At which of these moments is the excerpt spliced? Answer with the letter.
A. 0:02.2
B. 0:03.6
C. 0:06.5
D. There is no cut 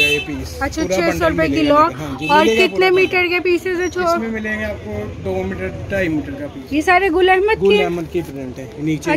C